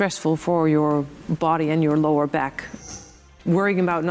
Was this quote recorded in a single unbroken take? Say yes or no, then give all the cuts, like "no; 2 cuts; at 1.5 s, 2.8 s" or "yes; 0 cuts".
no; 1 cut; at 2.8 s